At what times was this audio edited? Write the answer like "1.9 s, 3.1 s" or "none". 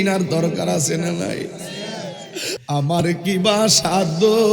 2.6 s